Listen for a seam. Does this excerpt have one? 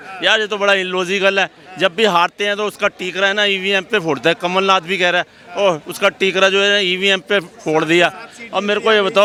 no; 0 cuts

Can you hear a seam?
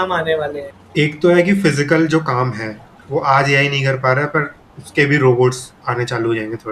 no; 0 cuts

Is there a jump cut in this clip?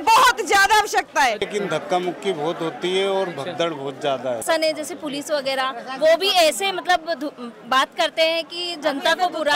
yes; 2 cuts; at 1.4 s, 4.4 s

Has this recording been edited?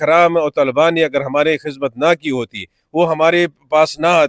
no; 0 cuts

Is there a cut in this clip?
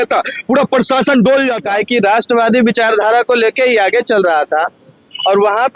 yes; 1 cut; at 1.6 s

